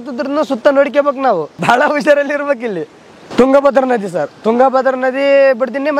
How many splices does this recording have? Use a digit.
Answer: 2